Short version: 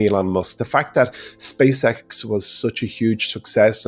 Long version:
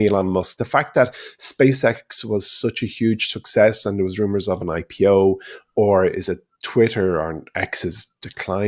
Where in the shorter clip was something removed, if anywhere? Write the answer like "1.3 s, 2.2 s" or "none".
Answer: none